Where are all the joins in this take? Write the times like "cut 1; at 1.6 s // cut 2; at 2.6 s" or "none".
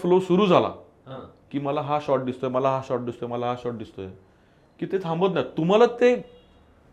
none